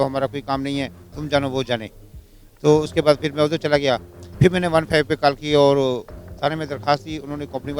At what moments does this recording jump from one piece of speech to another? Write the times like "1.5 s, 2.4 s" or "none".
none

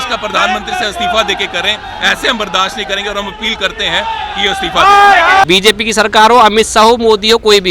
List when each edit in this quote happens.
5.4 s

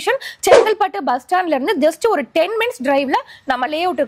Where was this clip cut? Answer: none

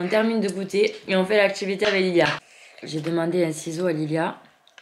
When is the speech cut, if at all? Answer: 2.4 s

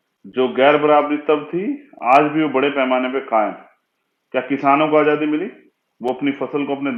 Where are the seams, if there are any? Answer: none

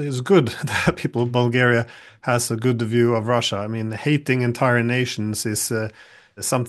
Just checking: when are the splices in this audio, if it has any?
none

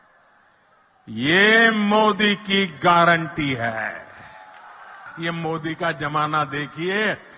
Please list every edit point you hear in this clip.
5.1 s

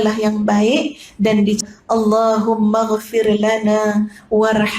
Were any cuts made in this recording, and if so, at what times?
1.6 s

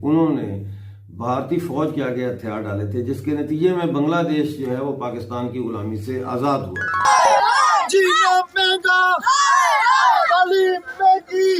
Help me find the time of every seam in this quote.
7.1 s

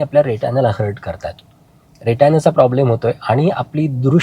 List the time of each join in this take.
none

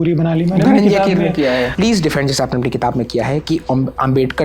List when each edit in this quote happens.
1.7 s

